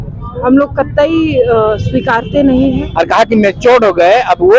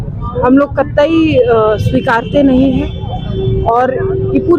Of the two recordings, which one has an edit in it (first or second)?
first